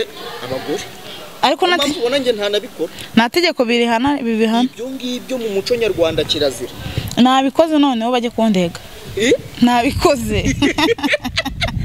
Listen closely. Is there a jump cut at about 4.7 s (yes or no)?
no